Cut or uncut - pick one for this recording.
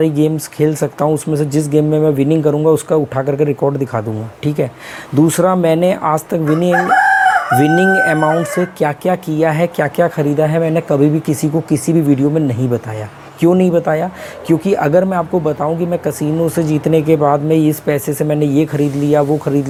uncut